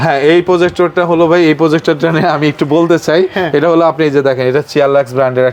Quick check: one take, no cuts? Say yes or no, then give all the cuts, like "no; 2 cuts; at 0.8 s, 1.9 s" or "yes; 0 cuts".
yes; 0 cuts